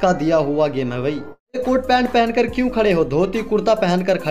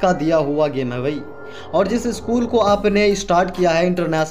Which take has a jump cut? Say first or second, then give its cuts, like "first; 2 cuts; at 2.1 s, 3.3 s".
first; 1 cut; at 1.6 s